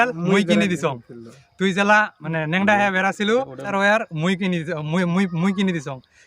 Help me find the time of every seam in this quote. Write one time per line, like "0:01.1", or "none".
0:02.2
0:03.7